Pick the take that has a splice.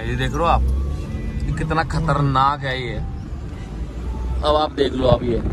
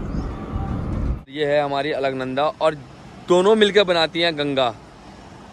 second; 1 cut; at 1.3 s

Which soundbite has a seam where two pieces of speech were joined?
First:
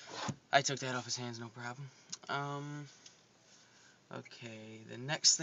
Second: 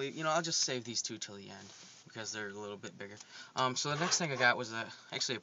first; 1 cut; at 2.0 s

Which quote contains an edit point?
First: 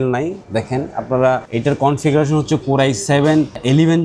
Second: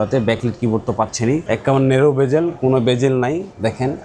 second; 1 cut; at 1.4 s

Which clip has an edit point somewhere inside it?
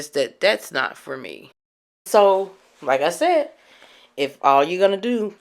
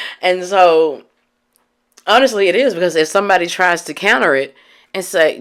first; 1 cut; at 2.0 s

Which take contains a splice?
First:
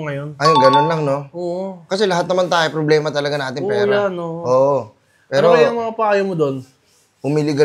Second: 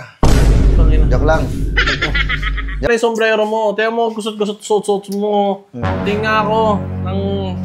second; 1 cut; at 2.9 s

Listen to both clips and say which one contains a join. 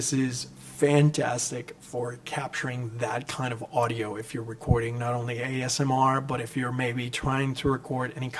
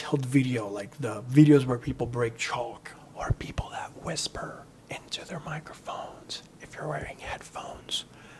second; 1 cut; at 2.9 s

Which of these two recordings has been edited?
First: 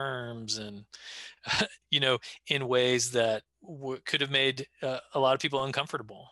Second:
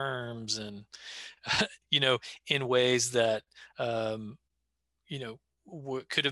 first; 1 cut; at 3.6 s

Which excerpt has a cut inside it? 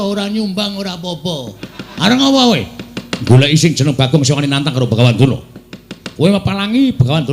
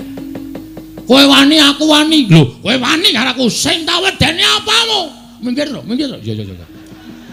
first; 1 cut; at 1.8 s

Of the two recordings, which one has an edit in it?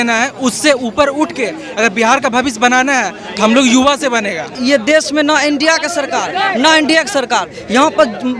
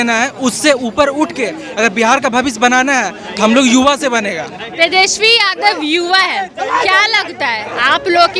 first; 1 cut; at 4.5 s

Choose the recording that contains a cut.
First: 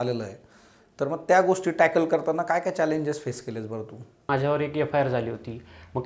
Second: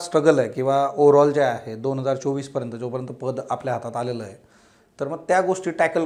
first; 1 cut; at 4.2 s

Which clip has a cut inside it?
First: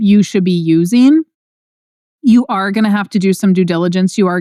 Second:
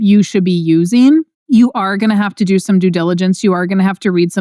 second; 1 cut; at 1.4 s

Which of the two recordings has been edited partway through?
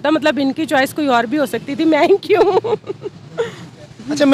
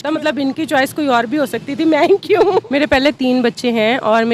second; 1 cut; at 2.7 s

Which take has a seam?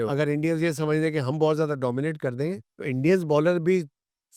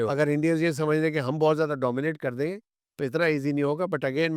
first; 1 cut; at 2.7 s

